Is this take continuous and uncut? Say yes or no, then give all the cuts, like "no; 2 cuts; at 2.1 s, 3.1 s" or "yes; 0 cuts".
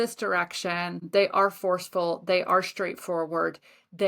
no; 1 cut; at 1.0 s